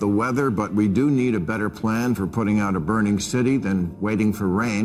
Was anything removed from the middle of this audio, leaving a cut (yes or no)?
no